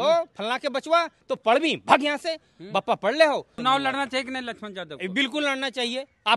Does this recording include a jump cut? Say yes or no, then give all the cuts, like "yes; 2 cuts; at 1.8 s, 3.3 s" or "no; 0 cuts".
yes; 1 cut; at 3.5 s